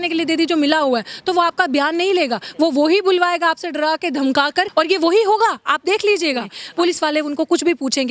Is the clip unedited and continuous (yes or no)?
no